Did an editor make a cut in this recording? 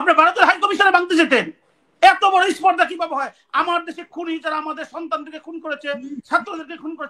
no; 0 cuts

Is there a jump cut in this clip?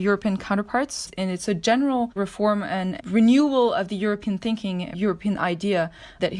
yes; 3 cuts; at 1.0 s, 2.7 s, 4.9 s

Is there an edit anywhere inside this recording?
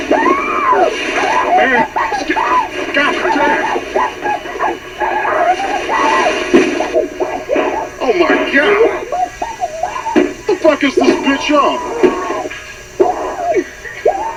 no; 0 cuts

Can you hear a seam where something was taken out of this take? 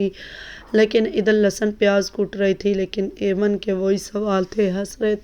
no; 0 cuts

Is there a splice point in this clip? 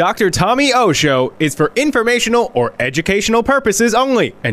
no; 0 cuts

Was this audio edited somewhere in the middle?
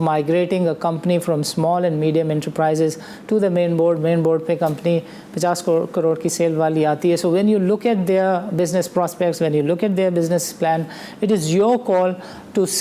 no; 0 cuts

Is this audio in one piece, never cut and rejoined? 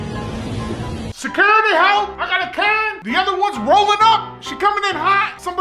yes; 0 cuts

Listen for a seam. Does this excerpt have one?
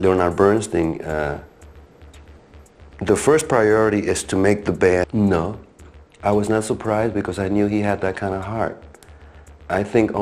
yes; 1 cut; at 5.0 s

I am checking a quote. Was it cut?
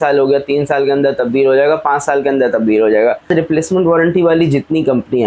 yes; 1 cut; at 3.3 s

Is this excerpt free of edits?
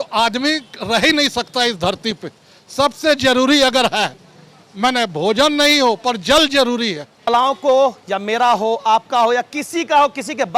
no; 1 cut; at 7.3 s

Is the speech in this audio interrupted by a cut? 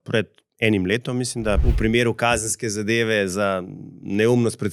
yes; 1 cut; at 1.6 s

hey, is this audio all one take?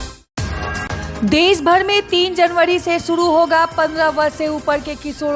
no; 1 cut; at 1.0 s

